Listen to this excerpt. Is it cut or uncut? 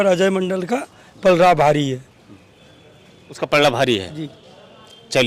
uncut